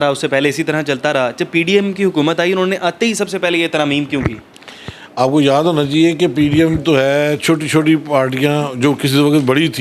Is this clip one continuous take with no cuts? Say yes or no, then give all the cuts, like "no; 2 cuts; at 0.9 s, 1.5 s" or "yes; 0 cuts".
yes; 0 cuts